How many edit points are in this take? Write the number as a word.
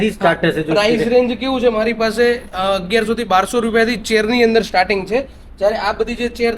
zero